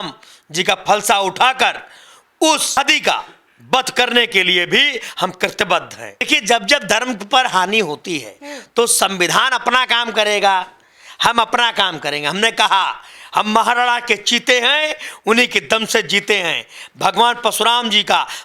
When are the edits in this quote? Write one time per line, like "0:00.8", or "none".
0:02.8
0:06.3